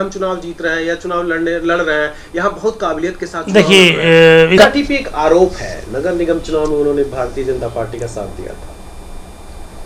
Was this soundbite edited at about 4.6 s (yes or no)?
yes